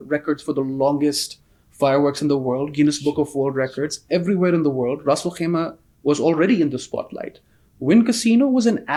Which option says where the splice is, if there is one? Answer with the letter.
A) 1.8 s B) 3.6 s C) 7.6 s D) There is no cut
D